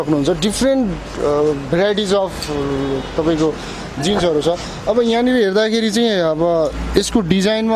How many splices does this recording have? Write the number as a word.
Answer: zero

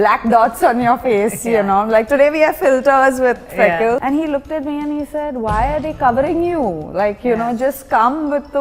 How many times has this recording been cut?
one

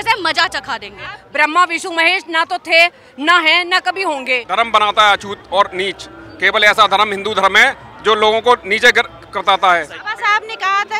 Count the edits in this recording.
three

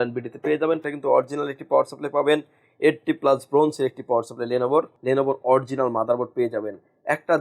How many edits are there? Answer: two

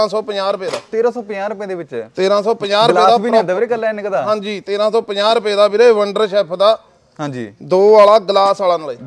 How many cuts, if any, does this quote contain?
zero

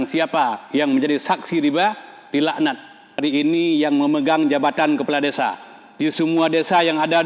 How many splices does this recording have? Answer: one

